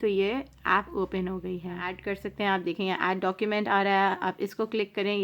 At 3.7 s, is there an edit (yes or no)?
no